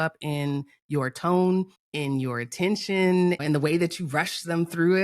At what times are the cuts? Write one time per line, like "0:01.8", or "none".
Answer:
0:01.8
0:03.4

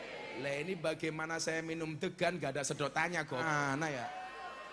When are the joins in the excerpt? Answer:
0:03.4

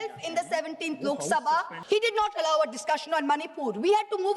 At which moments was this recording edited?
0:01.8

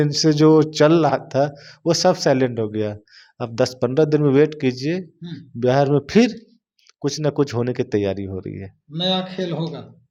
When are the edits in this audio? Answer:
none

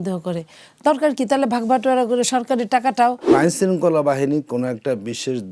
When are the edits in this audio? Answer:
0:03.3

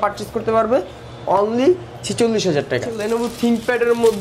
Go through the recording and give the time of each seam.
0:03.0

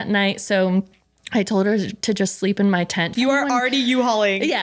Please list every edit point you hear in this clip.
0:03.2

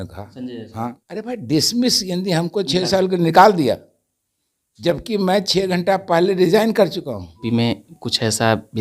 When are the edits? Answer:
0:01.0
0:07.4

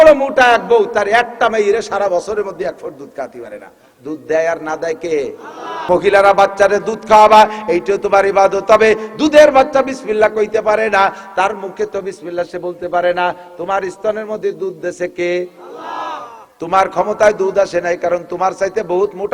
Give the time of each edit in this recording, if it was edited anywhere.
0:05.7

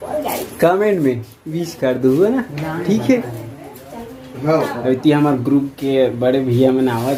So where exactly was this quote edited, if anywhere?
none

